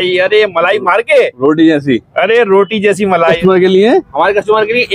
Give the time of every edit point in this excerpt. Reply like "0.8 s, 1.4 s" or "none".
3.4 s